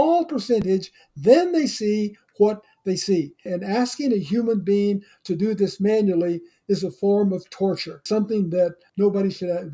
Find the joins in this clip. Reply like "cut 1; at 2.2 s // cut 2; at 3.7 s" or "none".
none